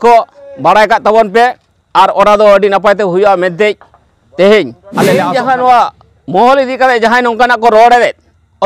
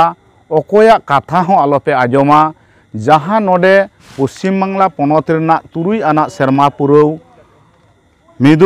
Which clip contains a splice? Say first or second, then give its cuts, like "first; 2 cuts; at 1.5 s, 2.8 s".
first; 1 cut; at 5.1 s